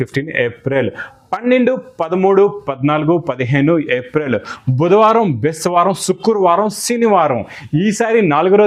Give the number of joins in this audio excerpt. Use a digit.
0